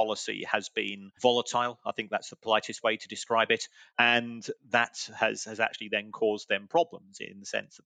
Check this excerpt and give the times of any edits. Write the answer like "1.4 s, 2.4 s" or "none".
1.1 s, 3.8 s